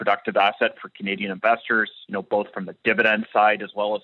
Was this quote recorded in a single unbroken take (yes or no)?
yes